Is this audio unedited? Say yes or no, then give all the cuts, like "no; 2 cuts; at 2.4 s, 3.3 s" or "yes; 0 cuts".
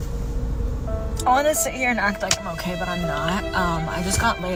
yes; 0 cuts